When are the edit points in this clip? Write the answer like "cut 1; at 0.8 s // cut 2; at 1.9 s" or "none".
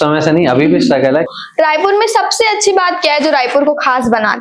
cut 1; at 1.3 s